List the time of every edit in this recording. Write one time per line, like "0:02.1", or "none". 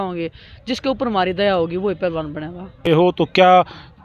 0:02.9